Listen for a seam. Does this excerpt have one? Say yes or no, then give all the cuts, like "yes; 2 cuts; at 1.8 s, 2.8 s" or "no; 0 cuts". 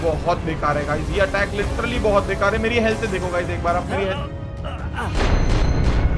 no; 0 cuts